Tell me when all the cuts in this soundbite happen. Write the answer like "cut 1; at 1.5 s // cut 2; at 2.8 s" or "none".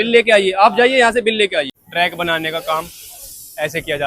cut 1; at 1.8 s

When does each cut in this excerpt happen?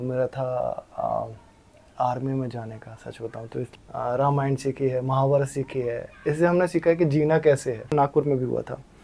cut 1; at 3.7 s // cut 2; at 7.9 s

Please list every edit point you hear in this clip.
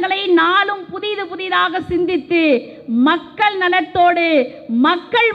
none

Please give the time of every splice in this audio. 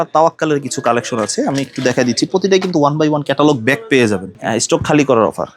cut 1; at 4.3 s

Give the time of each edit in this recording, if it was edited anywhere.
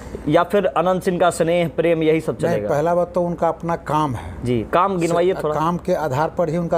none

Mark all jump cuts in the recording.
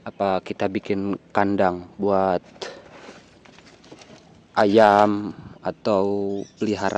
none

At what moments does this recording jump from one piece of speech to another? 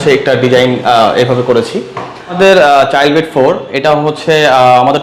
cut 1; at 2.3 s

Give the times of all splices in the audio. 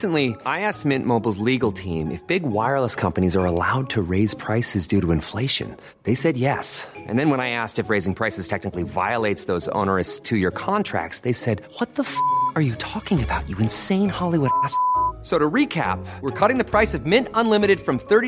none

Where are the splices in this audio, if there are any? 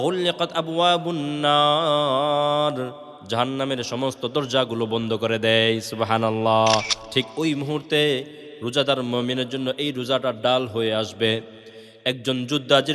cut 1; at 7.0 s

